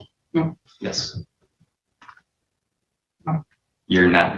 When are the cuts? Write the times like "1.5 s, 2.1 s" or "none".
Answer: none